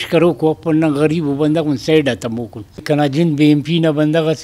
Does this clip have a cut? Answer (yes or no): yes